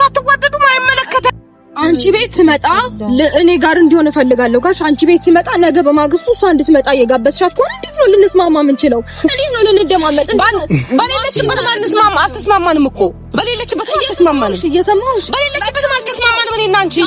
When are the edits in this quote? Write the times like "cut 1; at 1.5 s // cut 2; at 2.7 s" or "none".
cut 1; at 1.3 s